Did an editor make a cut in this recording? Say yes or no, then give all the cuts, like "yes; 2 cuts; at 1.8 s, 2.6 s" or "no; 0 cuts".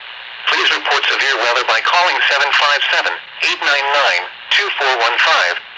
no; 0 cuts